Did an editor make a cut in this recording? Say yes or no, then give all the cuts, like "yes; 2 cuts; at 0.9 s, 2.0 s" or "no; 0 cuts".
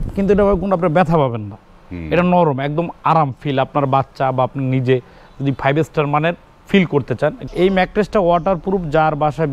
yes; 1 cut; at 7.4 s